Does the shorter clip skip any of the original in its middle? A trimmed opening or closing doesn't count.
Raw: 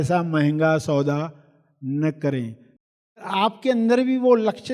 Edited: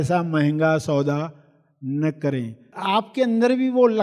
yes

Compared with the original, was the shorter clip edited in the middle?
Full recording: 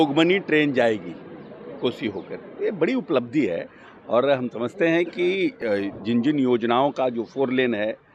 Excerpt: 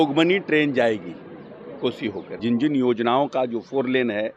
yes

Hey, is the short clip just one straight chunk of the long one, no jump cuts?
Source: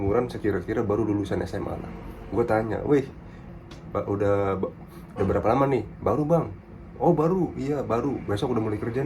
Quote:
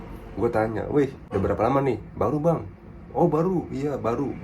no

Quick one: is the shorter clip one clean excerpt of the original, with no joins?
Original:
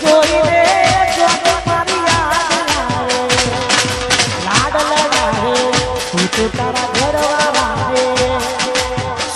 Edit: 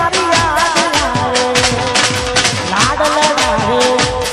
yes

